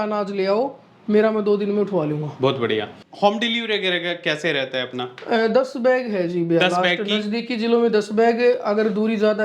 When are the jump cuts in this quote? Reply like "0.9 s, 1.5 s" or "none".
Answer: 3.0 s